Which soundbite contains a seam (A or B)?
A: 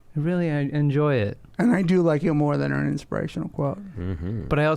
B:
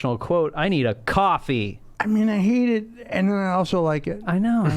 B